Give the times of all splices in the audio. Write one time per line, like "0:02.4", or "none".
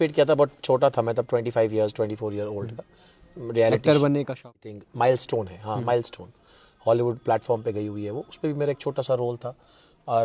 0:04.8